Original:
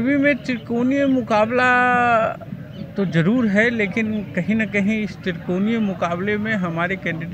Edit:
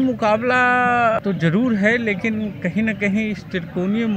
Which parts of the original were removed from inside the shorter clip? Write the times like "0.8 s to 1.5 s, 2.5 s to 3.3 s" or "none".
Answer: 2.3 s to 2.9 s